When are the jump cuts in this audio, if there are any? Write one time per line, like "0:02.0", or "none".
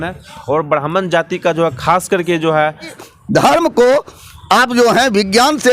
0:02.9